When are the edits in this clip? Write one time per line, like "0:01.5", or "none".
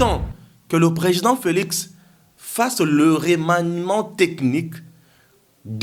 none